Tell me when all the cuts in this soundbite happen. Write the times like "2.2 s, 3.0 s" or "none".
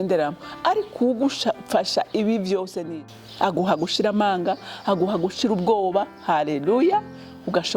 2.8 s